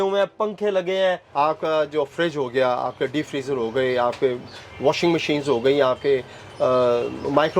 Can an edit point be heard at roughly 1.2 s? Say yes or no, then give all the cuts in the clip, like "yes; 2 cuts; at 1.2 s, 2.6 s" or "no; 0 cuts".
yes; 1 cut; at 1.2 s